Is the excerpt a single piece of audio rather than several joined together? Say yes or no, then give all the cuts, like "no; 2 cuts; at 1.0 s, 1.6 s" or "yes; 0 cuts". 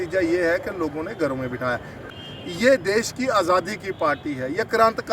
no; 1 cut; at 2.1 s